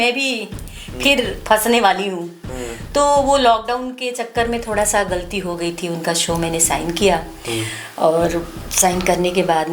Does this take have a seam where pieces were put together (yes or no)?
no